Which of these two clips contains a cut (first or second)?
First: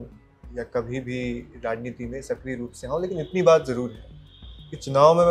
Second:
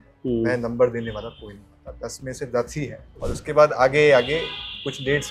second